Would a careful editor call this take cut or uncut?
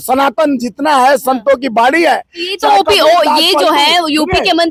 uncut